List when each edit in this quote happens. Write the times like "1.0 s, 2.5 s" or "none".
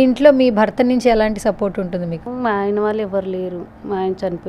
2.2 s

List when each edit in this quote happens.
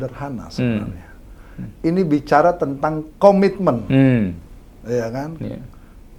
none

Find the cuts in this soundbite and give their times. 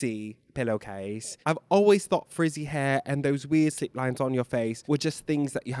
1.3 s, 4.8 s

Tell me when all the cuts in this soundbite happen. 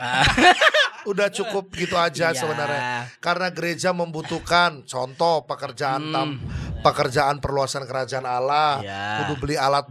none

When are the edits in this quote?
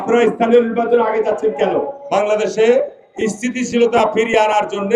2.0 s

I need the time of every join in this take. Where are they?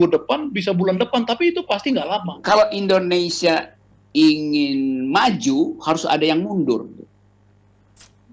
2.4 s

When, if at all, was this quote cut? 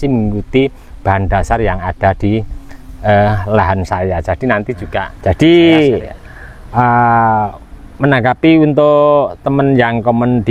5.1 s

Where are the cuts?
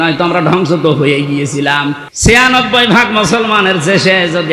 2.1 s

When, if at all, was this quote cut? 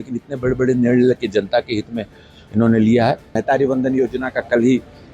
3.4 s

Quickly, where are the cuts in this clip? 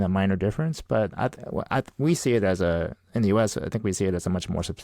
none

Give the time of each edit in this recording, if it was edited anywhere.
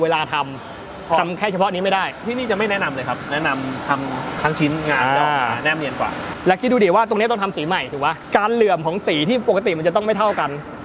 2.2 s, 3.3 s, 4.4 s, 6.3 s, 8.2 s

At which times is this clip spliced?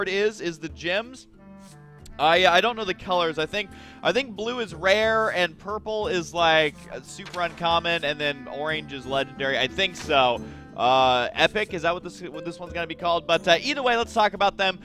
10.4 s

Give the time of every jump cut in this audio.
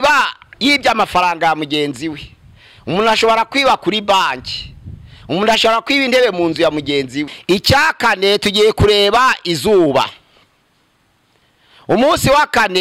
7.3 s

